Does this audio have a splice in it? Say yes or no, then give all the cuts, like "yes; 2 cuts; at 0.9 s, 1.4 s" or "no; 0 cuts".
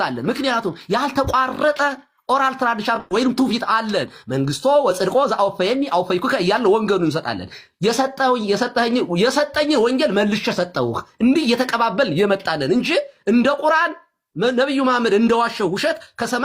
no; 0 cuts